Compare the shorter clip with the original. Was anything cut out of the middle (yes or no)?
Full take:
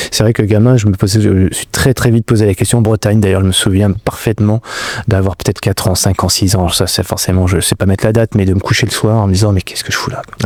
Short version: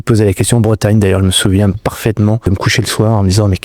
yes